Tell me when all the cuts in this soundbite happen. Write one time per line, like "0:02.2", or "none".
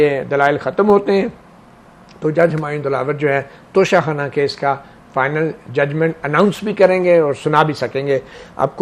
none